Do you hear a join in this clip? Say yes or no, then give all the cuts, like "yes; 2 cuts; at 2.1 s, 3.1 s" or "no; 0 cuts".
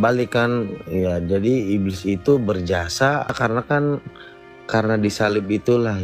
yes; 1 cut; at 3.3 s